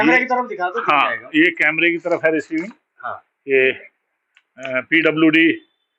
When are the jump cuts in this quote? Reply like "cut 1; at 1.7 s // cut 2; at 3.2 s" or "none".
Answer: none